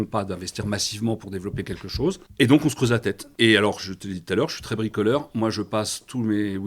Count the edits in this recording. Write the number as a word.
two